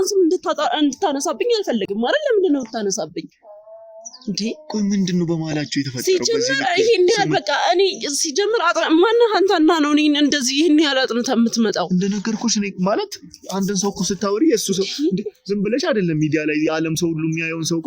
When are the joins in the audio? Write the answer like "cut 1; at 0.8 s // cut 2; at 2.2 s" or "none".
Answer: none

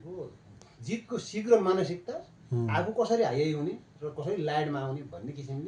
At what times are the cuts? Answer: none

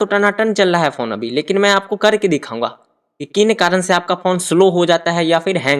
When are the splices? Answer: none

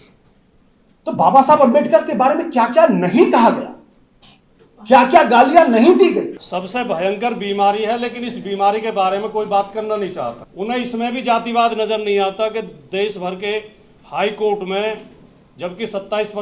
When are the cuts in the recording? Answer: cut 1; at 6.4 s // cut 2; at 10.4 s

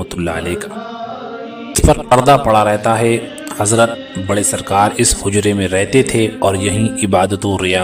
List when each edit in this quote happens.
cut 1; at 2.0 s

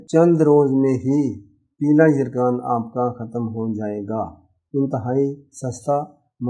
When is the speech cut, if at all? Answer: none

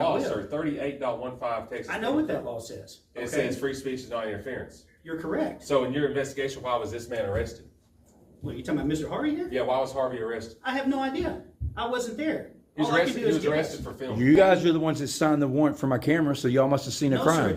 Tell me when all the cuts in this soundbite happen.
none

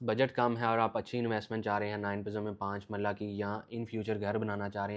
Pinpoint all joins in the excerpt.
none

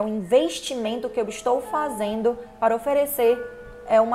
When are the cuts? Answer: none

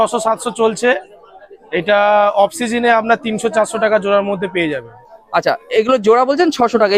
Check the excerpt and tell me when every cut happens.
none

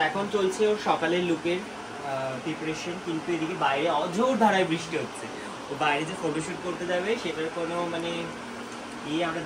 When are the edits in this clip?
none

